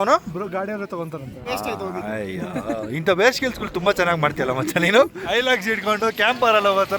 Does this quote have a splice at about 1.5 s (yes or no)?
yes